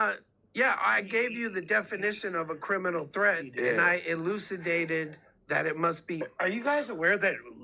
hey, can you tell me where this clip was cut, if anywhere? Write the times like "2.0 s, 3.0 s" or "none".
5.3 s, 6.3 s